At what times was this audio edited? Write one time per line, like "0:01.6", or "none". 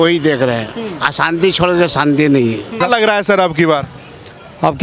0:02.7